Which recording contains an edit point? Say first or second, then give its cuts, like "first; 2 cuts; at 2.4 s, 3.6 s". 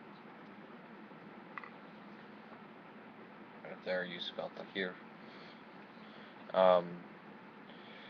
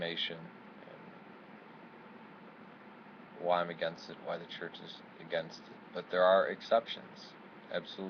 second; 1 cut; at 6.4 s